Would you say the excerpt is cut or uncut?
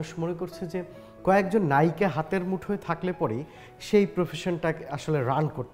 uncut